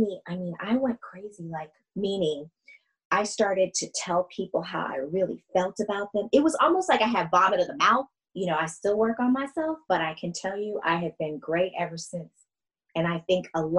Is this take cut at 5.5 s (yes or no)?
no